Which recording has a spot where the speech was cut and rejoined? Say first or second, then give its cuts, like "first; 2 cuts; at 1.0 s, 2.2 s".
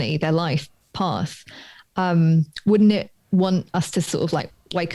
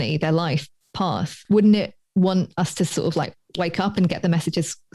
second; 1 cut; at 1.4 s